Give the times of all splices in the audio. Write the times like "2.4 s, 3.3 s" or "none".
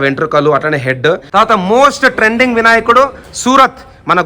1.2 s